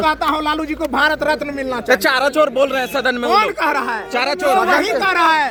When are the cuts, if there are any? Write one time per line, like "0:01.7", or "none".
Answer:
none